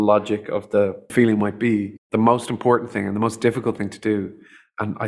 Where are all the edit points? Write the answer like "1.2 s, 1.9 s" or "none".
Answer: 1.1 s, 2.0 s